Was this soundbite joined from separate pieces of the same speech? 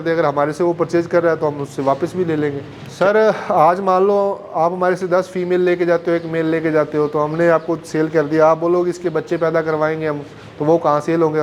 yes; 1 cut; at 2.8 s

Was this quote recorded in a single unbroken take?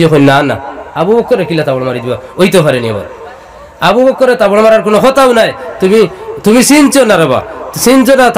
yes; 0 cuts

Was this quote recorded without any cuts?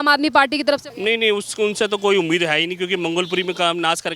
no; 1 cut; at 0.9 s

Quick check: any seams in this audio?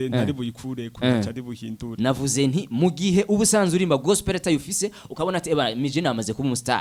no; 0 cuts

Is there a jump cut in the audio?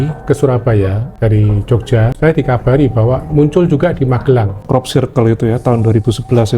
yes; 3 cuts; at 1.0 s, 2.1 s, 4.6 s

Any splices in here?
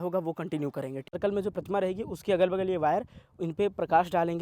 yes; 1 cut; at 1.1 s

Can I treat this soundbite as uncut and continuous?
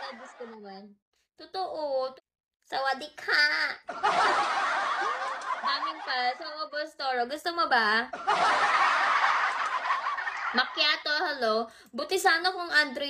no; 1 cut; at 2.1 s

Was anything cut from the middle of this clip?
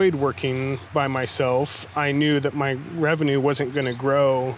no; 0 cuts

